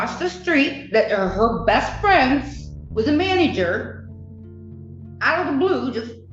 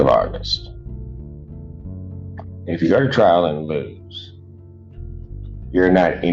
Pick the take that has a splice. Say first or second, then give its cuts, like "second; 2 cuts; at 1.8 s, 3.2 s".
second; 2 cuts; at 4.0 s, 5.4 s